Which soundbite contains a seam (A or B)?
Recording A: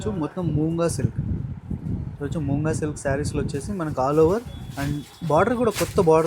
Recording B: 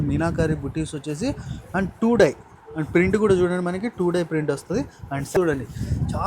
B